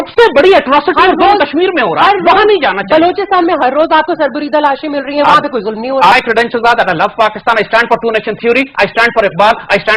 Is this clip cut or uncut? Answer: cut